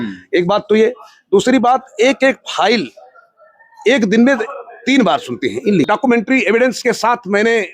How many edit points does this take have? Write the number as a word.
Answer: one